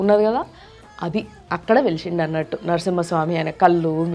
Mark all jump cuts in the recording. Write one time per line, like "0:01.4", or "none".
none